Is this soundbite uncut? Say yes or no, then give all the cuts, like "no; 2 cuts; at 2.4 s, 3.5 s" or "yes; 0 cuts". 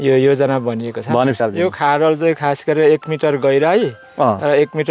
no; 1 cut; at 1.4 s